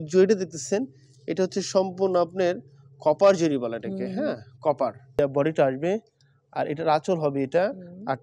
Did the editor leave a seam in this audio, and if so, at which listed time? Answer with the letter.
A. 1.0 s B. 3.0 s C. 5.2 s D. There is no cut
C